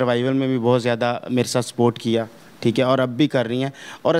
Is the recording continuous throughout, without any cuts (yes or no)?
yes